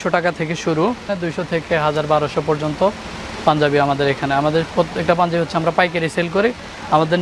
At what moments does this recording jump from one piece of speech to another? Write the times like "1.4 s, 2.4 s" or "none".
none